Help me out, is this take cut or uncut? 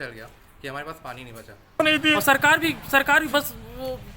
cut